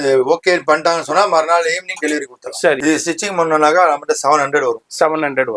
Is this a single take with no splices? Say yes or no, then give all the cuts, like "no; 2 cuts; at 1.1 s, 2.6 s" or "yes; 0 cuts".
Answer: no; 1 cut; at 2.8 s